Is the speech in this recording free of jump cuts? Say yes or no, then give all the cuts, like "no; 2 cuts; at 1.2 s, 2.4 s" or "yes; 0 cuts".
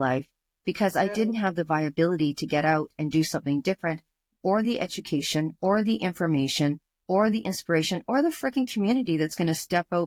yes; 0 cuts